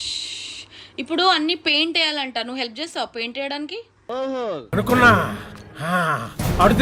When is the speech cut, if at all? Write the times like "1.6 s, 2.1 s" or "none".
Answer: none

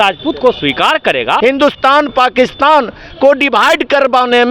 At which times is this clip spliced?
1.4 s

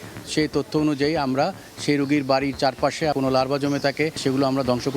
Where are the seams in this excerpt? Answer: 3.1 s, 4.2 s

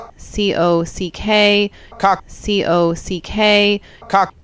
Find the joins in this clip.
none

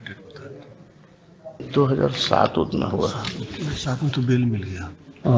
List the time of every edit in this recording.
1.6 s

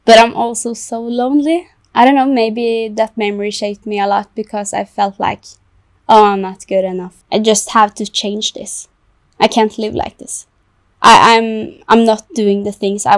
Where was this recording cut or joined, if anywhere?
1.8 s, 7.1 s

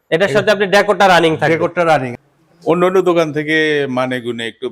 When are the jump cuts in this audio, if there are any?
2.1 s

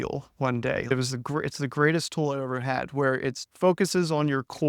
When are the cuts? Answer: 0.9 s, 3.5 s

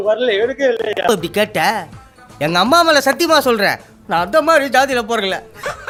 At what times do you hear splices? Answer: none

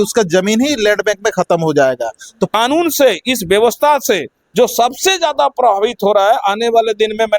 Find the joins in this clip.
2.5 s

